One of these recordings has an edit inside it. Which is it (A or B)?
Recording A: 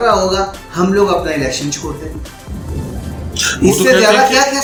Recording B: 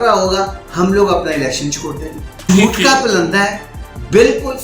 B